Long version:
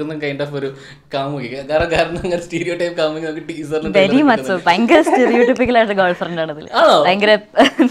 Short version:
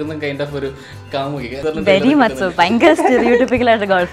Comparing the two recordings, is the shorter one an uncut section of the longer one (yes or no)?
no